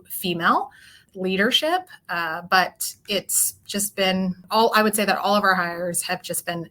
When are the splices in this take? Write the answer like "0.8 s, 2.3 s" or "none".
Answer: 1.0 s, 4.4 s